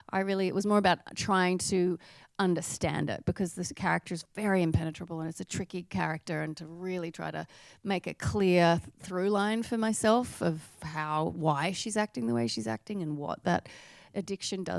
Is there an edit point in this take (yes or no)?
no